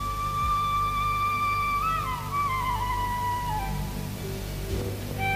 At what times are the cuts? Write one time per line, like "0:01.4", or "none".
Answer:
none